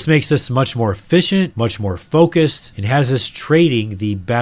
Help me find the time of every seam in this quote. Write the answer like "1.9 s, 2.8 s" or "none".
none